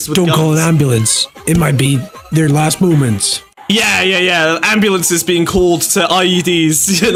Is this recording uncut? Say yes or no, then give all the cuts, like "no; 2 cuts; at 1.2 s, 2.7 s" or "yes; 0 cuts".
yes; 0 cuts